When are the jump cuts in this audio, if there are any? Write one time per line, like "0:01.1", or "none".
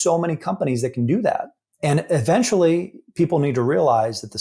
0:01.6